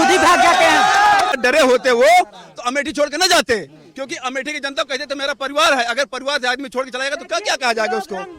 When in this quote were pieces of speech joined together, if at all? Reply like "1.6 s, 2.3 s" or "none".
1.3 s